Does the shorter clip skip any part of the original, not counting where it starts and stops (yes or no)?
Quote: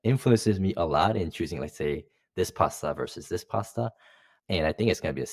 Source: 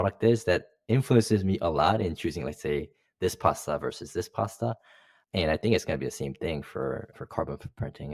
no